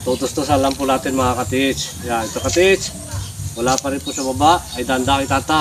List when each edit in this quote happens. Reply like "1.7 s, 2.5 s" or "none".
none